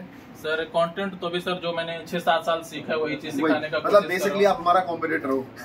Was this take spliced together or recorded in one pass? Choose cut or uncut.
uncut